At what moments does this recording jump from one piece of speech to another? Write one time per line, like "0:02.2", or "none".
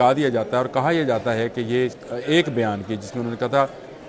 0:02.0